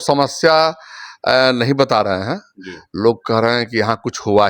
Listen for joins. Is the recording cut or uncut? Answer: uncut